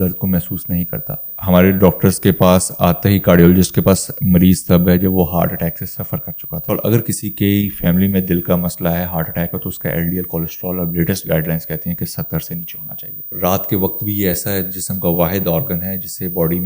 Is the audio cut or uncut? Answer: cut